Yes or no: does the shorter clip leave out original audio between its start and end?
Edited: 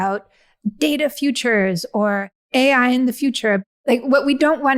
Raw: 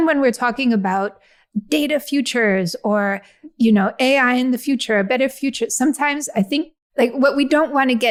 yes